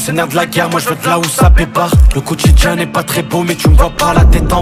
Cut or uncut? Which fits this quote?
uncut